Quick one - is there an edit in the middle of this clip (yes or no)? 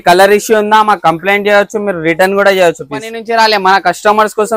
yes